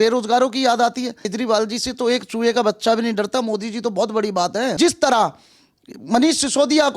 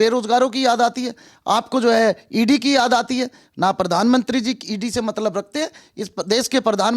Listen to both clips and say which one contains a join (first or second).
first